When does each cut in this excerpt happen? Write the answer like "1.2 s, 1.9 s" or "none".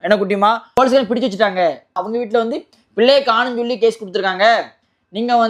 0.8 s, 1.9 s